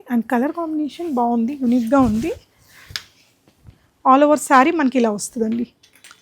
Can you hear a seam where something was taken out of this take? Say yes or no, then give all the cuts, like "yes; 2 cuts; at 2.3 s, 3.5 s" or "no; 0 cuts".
no; 0 cuts